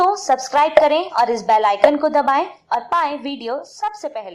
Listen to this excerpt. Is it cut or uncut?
uncut